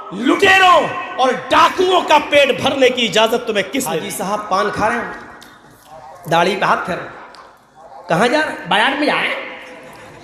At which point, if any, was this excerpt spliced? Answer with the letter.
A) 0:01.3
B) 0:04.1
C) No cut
B